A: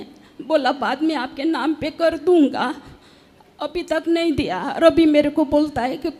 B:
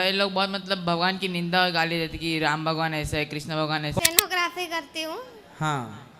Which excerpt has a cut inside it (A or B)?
B